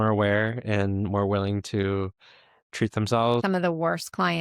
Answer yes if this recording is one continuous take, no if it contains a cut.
no